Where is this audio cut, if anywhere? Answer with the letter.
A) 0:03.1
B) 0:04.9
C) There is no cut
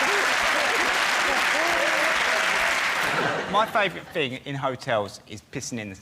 A